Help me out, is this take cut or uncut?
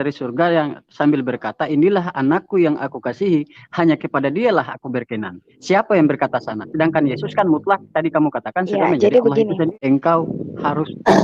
cut